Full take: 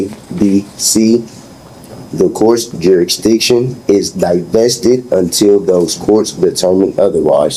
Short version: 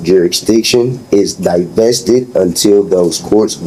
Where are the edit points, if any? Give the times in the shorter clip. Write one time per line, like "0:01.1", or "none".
none